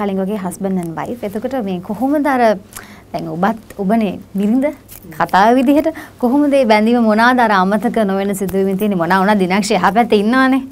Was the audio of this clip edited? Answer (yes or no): no